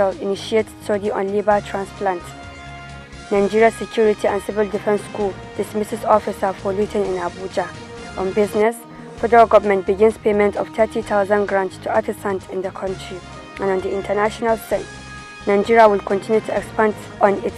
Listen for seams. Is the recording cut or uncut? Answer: uncut